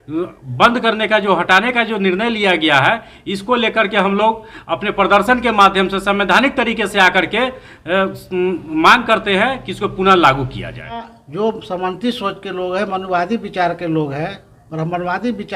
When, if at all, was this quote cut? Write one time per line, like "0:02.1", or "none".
0:11.2